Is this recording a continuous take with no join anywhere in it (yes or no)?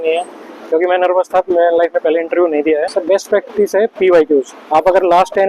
no